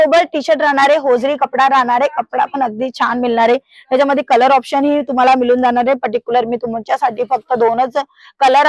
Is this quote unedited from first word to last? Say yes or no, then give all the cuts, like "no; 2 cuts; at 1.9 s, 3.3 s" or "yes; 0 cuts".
yes; 0 cuts